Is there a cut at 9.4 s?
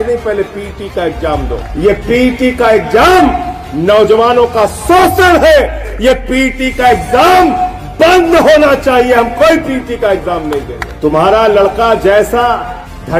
no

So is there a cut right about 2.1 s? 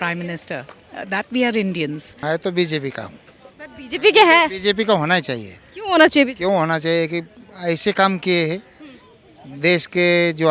yes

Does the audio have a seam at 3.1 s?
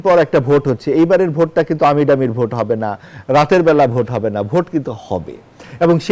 no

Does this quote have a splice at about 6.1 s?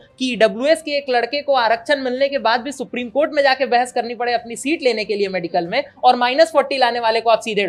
no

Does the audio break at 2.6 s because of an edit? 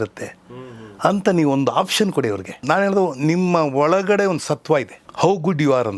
yes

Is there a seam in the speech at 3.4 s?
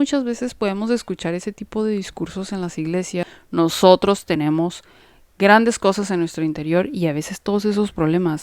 yes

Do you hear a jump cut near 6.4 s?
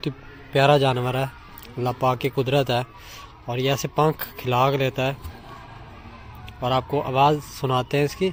no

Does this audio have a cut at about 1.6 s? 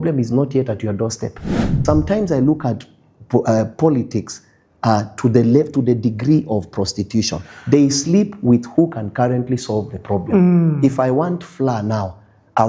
yes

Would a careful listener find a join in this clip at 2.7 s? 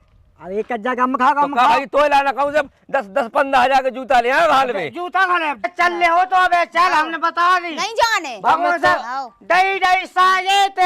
no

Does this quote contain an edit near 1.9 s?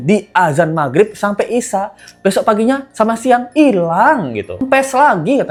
no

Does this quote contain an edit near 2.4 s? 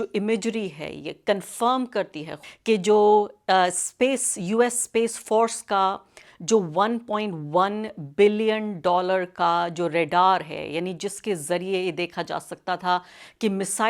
yes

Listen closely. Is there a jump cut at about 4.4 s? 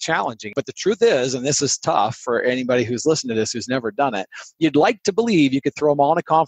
no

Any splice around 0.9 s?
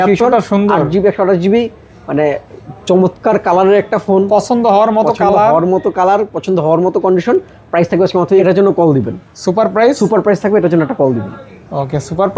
no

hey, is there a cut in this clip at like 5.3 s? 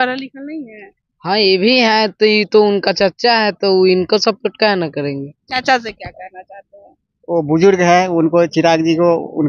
yes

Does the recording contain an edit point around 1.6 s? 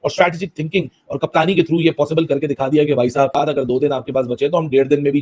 no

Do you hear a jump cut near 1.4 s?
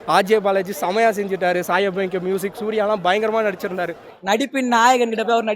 no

